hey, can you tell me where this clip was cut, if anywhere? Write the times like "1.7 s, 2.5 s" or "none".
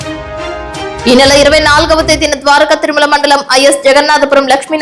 none